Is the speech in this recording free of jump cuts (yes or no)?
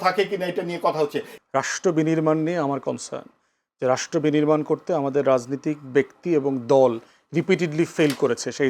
no